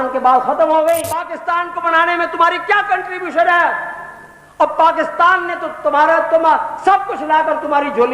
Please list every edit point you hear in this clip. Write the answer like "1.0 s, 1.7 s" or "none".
1.4 s